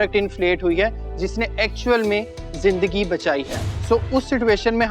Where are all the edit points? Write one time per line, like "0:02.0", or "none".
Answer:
0:03.6